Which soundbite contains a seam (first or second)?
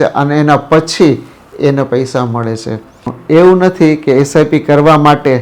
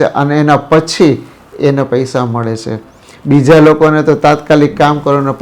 first